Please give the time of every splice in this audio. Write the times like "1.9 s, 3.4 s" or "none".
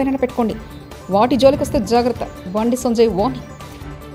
none